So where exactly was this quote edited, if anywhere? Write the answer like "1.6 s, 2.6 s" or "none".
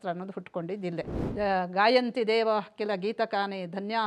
1.2 s

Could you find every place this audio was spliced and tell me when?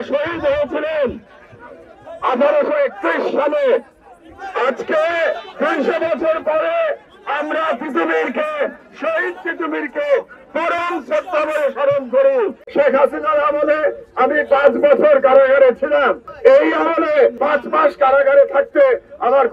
12.6 s, 16.2 s, 17.4 s

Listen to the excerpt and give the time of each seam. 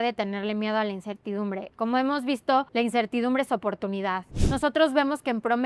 2.7 s, 4.3 s

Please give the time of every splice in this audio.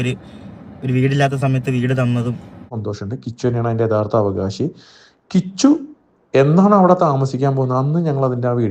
2.8 s

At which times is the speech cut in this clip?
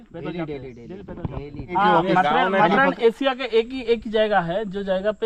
1.7 s

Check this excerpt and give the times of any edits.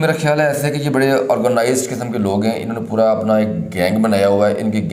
none

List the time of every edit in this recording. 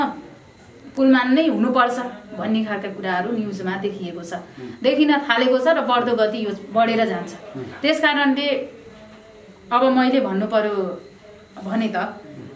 none

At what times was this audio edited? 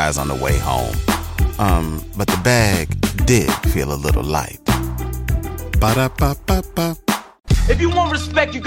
7.3 s

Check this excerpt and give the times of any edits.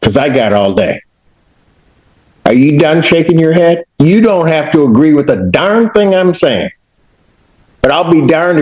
none

